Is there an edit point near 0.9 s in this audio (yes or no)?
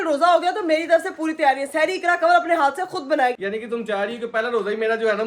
no